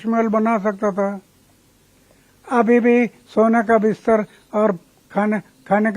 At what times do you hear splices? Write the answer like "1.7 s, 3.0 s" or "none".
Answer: none